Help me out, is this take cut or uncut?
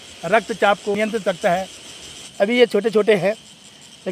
cut